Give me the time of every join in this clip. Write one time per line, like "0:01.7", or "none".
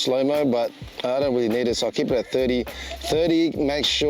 none